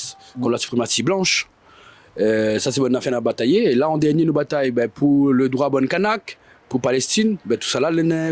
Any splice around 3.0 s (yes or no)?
no